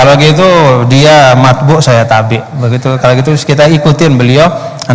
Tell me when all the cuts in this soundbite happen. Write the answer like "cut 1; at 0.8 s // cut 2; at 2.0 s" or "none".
none